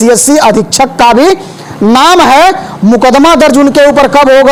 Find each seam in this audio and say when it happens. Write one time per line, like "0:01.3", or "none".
none